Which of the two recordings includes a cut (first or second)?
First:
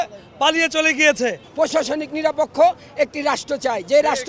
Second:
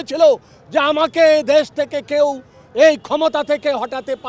first